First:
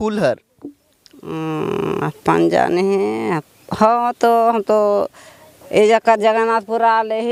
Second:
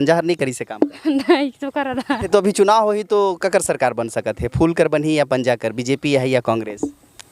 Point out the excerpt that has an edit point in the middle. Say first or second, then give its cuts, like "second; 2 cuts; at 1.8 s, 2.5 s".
second; 1 cut; at 2.2 s